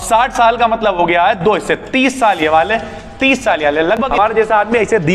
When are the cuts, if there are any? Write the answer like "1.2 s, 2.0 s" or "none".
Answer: 4.1 s